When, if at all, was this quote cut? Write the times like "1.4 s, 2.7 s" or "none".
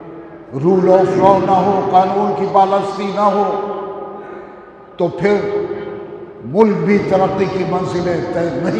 none